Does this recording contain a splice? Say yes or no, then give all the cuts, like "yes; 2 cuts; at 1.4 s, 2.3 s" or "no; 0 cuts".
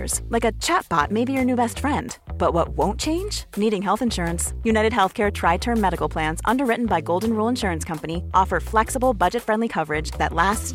no; 0 cuts